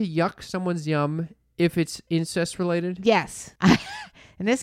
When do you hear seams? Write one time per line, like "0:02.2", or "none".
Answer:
0:03.4